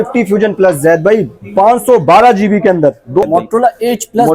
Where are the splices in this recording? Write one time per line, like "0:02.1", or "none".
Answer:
0:03.2